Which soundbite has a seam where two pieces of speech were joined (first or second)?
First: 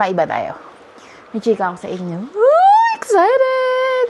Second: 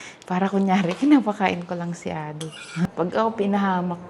second